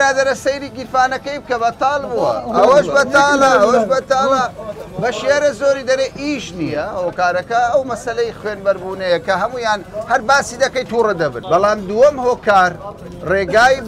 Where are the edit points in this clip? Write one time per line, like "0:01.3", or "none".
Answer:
0:06.8
0:11.4